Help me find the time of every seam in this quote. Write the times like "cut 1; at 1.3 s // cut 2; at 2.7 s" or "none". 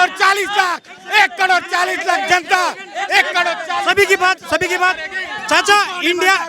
none